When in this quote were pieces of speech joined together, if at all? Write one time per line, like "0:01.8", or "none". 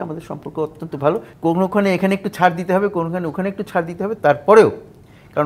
0:01.3